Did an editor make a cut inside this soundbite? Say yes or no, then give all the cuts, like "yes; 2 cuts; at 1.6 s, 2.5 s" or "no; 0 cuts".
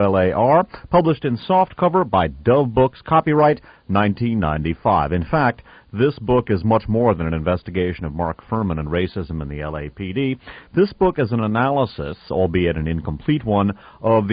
yes; 1 cut; at 11.1 s